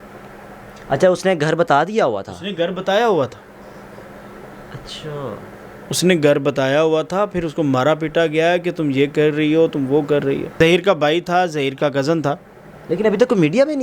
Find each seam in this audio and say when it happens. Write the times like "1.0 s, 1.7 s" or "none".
10.5 s